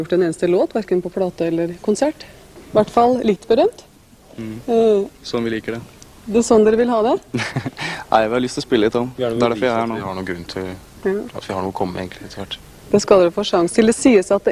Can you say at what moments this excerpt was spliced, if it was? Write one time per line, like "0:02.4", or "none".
0:02.6